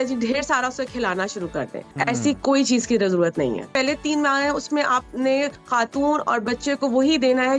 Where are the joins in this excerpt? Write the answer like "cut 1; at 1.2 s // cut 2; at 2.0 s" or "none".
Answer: cut 1; at 1.8 s // cut 2; at 3.7 s // cut 3; at 5.6 s